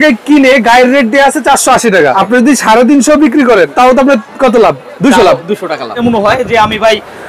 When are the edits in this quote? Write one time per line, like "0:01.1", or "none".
0:02.1
0:03.7
0:06.0